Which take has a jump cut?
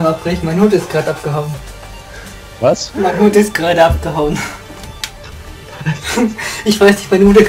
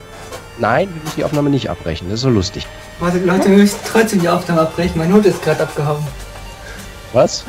second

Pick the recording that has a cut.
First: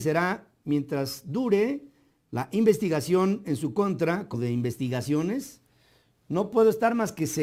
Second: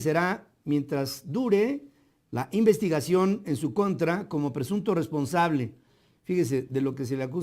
second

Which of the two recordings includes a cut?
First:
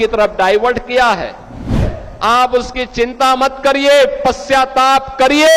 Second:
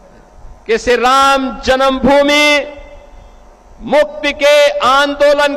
first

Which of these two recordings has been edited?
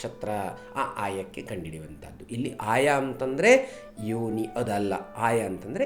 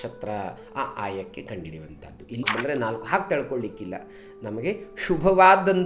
second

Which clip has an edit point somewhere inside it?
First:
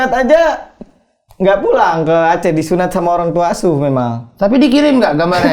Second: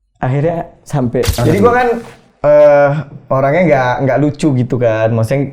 second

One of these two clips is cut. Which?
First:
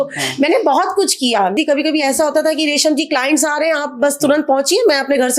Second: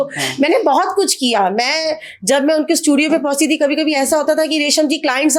first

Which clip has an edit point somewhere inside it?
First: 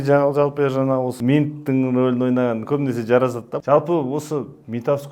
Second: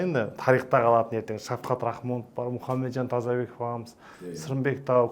first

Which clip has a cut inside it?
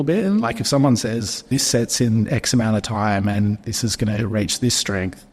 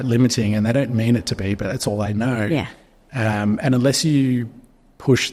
first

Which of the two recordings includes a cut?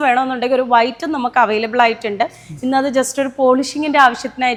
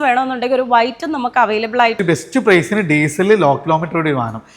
second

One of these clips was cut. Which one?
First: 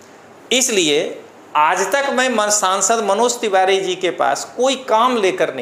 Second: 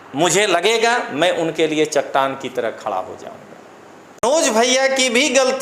second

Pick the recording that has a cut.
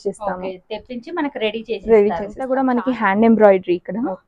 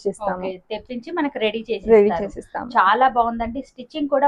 first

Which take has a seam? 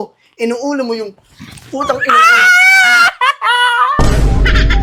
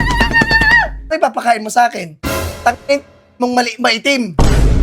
second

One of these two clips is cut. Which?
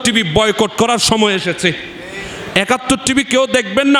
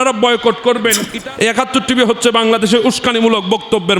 second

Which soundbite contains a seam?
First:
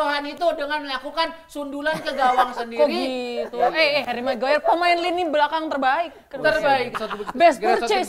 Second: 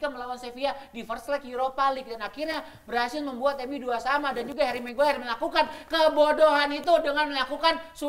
first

